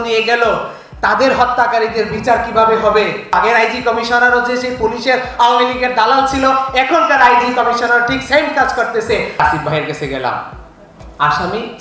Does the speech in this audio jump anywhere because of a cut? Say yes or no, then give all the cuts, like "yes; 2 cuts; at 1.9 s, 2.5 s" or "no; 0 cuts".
yes; 2 cuts; at 3.3 s, 9.4 s